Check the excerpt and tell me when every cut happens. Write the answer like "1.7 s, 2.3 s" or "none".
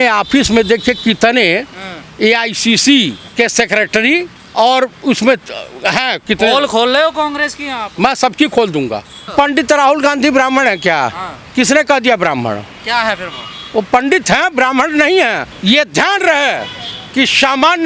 3.2 s, 4.4 s, 9.3 s, 15.5 s